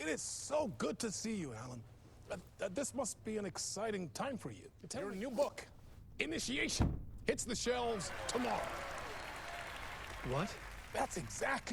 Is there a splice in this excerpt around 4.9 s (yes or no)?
yes